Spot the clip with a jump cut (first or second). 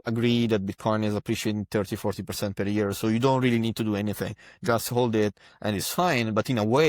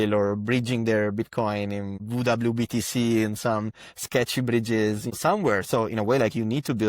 second